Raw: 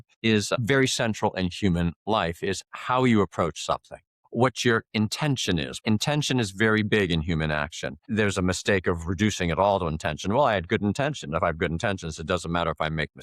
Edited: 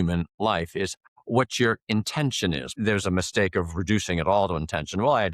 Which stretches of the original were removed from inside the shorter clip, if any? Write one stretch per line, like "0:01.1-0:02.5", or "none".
0:02.7-0:04.1
0:05.7-0:08.0

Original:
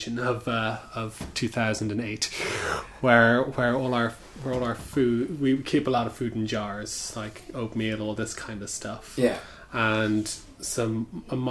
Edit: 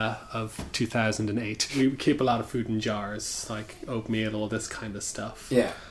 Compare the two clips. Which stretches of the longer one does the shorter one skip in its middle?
0:02.3-0:05.3

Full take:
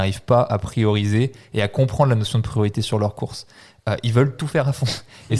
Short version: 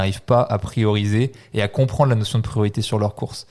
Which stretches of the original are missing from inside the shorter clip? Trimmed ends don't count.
none

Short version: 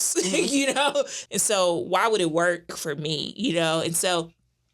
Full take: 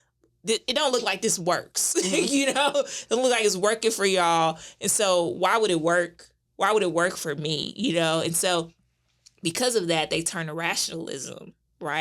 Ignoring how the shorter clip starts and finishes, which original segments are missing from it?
0:03.0-0:04.7
0:06.3-0:07.2

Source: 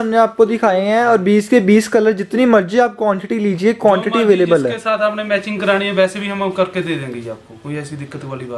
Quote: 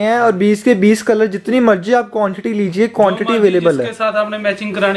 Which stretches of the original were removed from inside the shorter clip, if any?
none

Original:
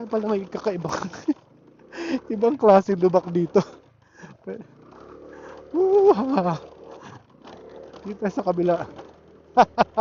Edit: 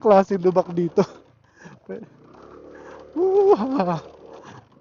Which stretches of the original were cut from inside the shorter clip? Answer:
none

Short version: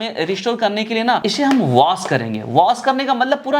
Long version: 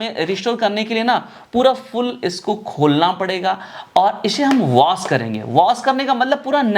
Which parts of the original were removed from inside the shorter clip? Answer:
0:01.2-0:04.2

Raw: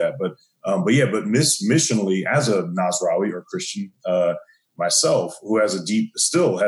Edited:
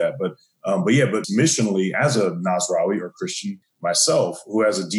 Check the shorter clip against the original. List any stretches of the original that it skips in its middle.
0:01.2-0:01.6
0:03.9-0:04.5

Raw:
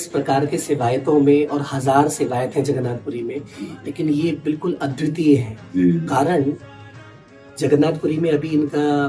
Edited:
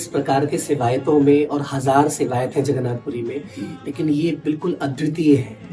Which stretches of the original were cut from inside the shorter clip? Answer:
none

